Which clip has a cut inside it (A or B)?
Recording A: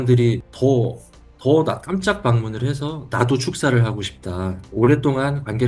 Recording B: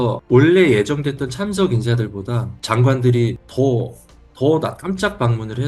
A